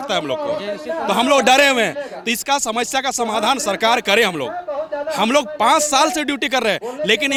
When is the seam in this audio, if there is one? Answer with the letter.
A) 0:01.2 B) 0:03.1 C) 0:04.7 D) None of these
D